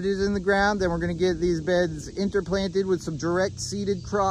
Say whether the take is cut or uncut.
uncut